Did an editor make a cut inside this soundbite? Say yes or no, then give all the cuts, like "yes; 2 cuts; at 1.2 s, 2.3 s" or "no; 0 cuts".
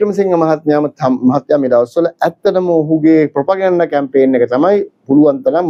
no; 0 cuts